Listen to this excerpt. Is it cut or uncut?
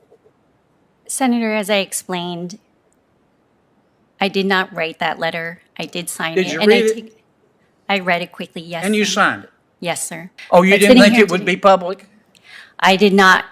cut